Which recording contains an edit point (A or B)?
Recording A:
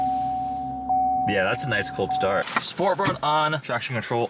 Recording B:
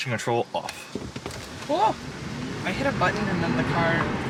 A